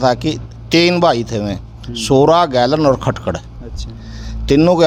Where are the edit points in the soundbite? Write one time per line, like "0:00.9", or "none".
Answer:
none

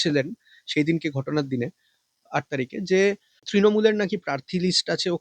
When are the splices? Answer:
0:03.4

